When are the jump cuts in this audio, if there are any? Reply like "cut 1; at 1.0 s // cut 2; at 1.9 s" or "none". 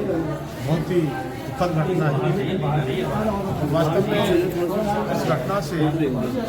none